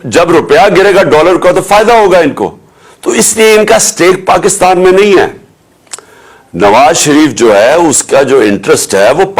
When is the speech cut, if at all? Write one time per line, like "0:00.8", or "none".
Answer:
none